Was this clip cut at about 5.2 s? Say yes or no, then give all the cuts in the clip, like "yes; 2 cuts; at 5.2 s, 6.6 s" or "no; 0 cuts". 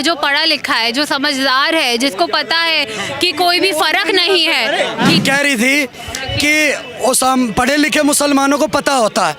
yes; 1 cut; at 5.2 s